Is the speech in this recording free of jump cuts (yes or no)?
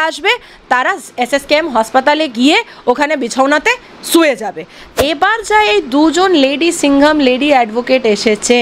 no